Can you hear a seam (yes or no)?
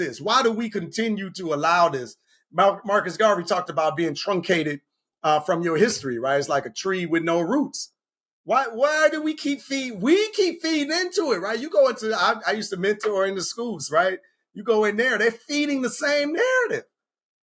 no